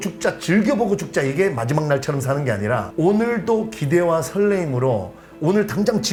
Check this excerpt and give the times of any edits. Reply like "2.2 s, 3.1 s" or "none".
none